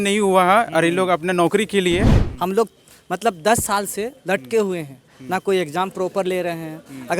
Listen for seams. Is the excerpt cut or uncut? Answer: cut